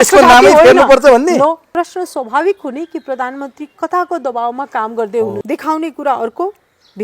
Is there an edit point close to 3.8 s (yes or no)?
no